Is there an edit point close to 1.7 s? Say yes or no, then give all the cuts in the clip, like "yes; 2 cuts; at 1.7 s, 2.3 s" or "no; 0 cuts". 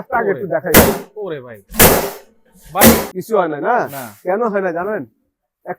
no; 1 cut; at 3.1 s